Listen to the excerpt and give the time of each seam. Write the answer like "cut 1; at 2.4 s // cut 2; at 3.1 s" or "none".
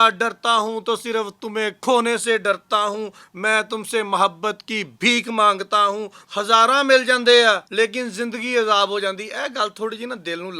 cut 1; at 6.2 s // cut 2; at 7.7 s